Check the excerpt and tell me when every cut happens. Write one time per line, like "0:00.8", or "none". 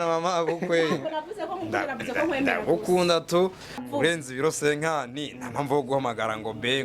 0:03.9